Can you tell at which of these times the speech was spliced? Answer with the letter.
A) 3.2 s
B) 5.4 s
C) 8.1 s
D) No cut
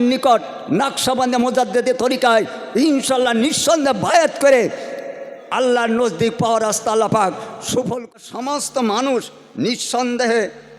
C